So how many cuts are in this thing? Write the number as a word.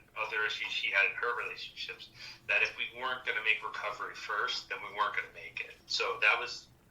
one